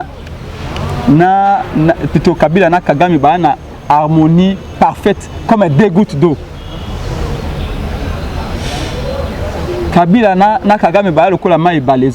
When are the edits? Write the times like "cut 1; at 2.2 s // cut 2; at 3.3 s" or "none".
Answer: none